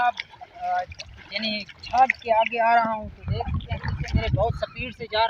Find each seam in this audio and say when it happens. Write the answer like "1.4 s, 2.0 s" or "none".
none